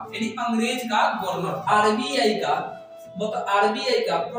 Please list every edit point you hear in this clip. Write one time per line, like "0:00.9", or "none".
0:01.6